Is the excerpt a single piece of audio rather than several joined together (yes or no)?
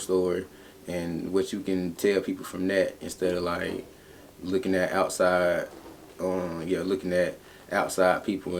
yes